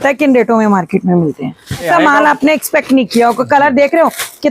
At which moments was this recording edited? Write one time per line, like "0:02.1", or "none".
0:01.9

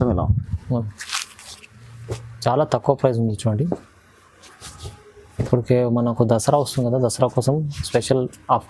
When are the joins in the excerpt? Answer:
0:01.0

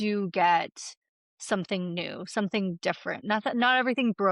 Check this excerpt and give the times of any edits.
0:03.2

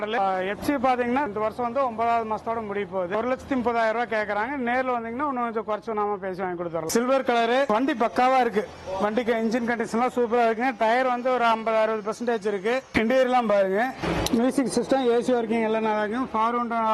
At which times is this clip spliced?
0:01.3
0:03.1
0:06.9

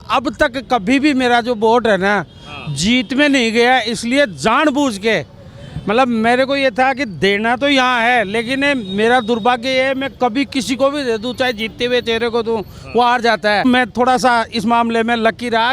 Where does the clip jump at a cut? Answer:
0:13.6

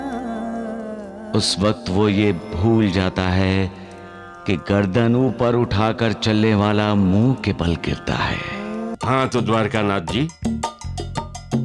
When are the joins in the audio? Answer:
0:08.9

